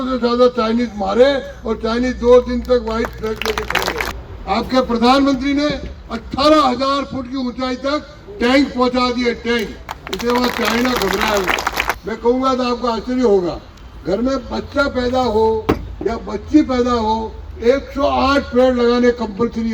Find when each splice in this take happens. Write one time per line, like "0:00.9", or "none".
0:04.1
0:11.9